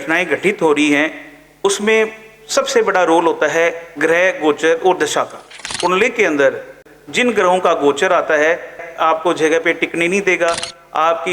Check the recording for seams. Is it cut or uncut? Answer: cut